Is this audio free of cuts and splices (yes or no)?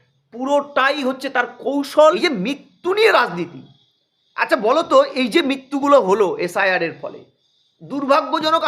no